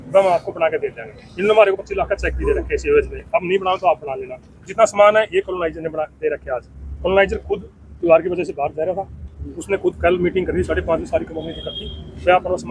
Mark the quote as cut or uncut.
uncut